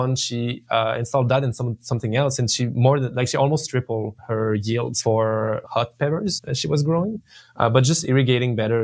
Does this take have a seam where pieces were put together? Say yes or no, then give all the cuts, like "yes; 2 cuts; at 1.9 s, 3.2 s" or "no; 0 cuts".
yes; 4 cuts; at 4.2 s, 4.9 s, 5.6 s, 6.5 s